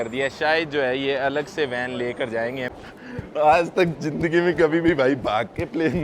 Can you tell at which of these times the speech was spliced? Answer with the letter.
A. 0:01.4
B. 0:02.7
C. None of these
B